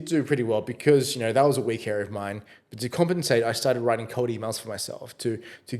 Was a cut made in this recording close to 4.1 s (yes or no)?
no